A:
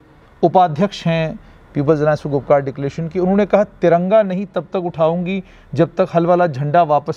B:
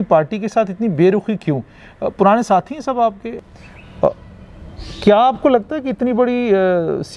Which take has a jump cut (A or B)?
B